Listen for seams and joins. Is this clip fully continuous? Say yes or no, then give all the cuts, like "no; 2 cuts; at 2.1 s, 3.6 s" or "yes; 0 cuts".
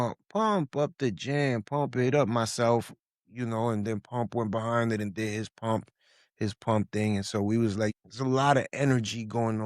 no; 1 cut; at 7.9 s